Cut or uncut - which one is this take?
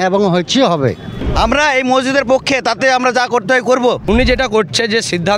cut